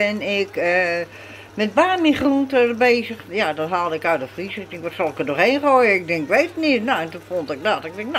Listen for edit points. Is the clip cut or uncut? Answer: uncut